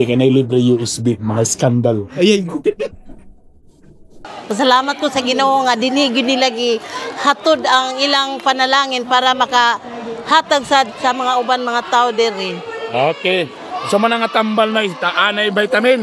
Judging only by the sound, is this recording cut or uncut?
cut